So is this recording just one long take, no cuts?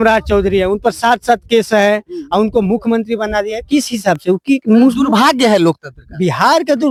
yes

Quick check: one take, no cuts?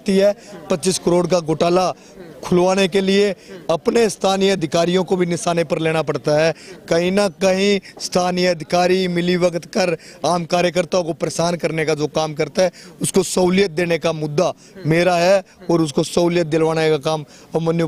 yes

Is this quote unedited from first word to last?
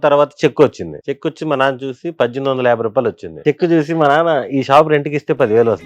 no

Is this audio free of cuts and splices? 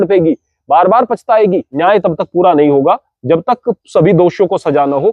no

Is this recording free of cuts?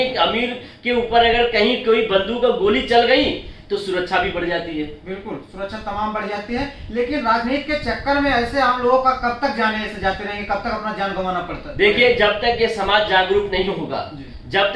yes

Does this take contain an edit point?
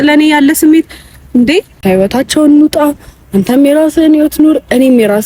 yes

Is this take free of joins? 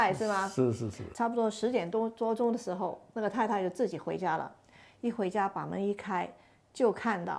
no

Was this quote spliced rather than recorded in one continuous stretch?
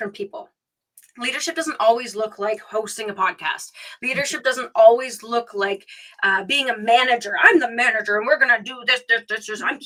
no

